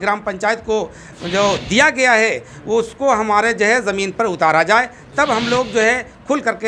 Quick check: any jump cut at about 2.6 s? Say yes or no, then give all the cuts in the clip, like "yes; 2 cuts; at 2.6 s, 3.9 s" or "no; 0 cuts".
no; 0 cuts